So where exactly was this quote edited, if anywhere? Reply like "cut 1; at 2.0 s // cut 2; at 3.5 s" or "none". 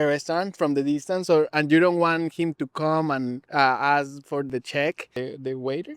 cut 1; at 3.4 s // cut 2; at 4.5 s // cut 3; at 5.1 s